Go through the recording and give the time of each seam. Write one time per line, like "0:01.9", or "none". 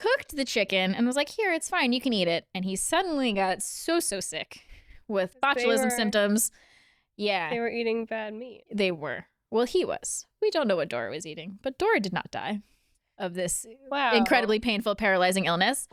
none